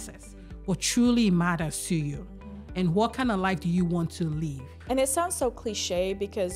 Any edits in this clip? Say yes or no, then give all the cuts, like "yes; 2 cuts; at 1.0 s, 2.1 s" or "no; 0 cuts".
no; 0 cuts